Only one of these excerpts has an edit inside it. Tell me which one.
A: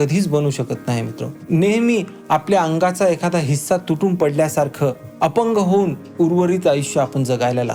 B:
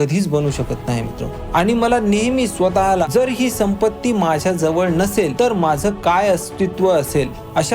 B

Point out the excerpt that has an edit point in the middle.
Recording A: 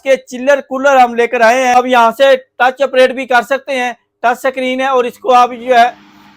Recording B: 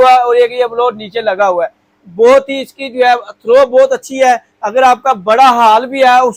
A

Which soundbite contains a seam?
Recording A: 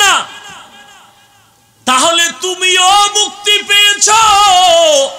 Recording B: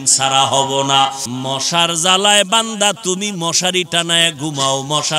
B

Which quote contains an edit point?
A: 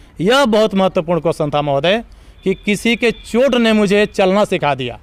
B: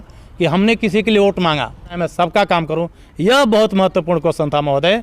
B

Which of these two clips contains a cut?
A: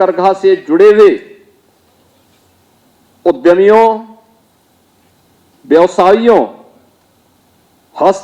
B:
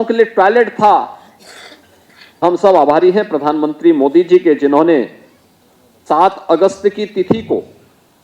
B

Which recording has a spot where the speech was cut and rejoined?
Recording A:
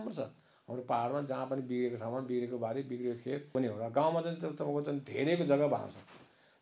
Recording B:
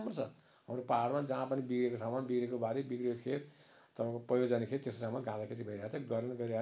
A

